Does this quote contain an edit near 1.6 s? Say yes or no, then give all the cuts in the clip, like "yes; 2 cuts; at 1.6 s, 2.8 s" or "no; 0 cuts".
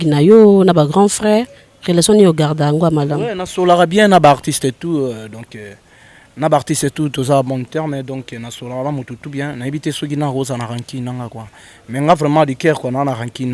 no; 0 cuts